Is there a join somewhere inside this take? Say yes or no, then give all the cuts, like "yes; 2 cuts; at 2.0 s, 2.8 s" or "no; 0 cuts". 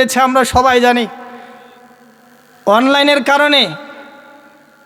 no; 0 cuts